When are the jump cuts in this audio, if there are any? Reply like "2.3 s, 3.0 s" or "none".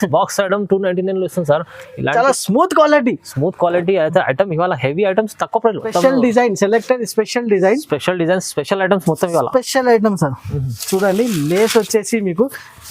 5.9 s